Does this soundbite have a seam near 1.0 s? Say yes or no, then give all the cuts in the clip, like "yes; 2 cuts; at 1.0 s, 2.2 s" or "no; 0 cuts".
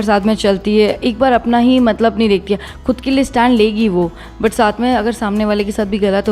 no; 0 cuts